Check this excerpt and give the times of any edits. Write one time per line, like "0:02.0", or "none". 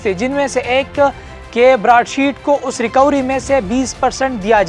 none